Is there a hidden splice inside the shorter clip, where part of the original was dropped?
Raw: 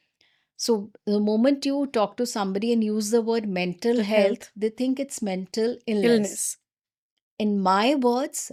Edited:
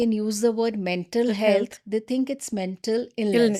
no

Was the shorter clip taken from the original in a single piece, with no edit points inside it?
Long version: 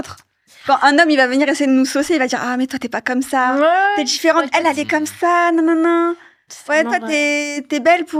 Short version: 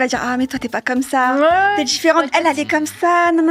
yes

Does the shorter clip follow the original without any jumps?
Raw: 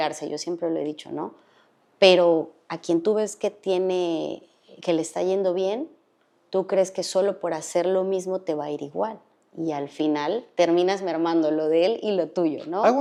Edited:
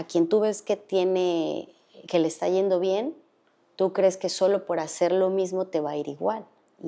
yes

